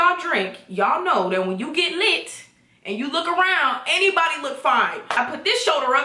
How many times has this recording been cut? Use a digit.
1